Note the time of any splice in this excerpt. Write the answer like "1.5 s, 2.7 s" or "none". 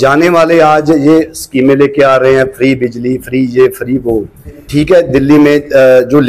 4.6 s